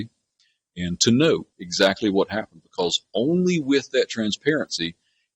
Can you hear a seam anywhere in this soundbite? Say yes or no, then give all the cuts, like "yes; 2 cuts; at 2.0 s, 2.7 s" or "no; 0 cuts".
no; 0 cuts